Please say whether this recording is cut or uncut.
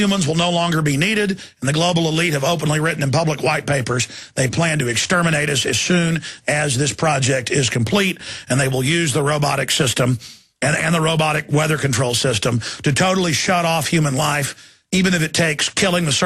cut